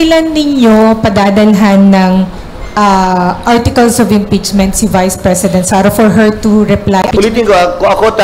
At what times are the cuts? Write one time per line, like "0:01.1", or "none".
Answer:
0:07.1